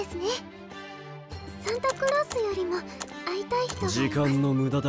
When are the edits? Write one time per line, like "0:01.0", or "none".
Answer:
0:03.9